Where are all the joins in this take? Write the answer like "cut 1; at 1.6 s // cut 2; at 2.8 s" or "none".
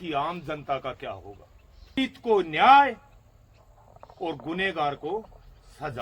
cut 1; at 2.0 s